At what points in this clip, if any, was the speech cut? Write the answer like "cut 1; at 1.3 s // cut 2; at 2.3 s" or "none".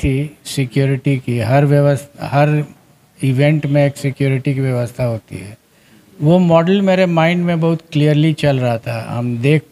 none